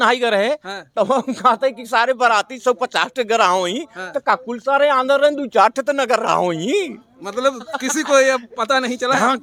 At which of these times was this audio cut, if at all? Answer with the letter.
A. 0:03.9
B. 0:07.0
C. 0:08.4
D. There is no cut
D